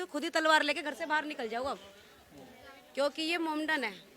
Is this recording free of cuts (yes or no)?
yes